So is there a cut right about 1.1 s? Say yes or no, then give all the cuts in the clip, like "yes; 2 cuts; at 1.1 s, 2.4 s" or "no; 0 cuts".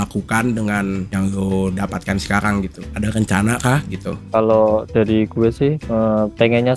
yes; 2 cuts; at 1.1 s, 2.8 s